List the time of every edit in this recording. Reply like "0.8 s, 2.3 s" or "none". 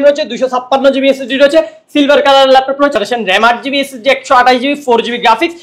2.9 s